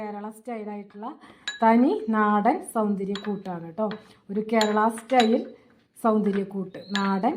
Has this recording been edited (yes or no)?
no